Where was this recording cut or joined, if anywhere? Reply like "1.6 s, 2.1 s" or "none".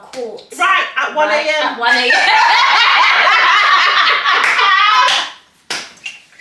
none